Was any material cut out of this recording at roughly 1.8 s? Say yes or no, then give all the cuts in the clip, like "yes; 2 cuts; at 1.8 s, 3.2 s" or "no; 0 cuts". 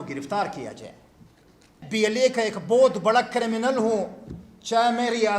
yes; 1 cut; at 1.8 s